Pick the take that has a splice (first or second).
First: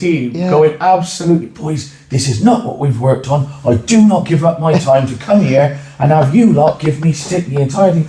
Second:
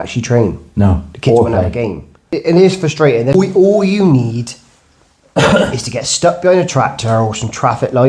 second